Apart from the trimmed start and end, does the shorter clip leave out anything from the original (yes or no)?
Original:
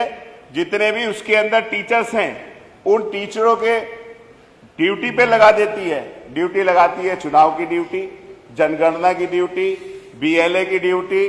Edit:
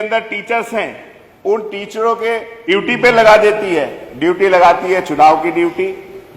yes